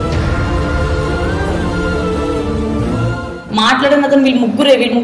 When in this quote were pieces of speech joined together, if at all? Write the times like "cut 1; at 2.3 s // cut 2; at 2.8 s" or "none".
cut 1; at 3.4 s